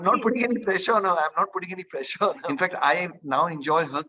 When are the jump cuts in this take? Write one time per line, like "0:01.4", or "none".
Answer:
0:02.4